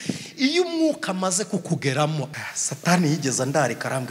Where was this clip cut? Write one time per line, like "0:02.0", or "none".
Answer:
0:02.3